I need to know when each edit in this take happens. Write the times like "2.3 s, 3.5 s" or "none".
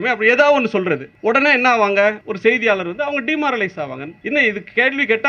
1.1 s, 2.3 s, 4.1 s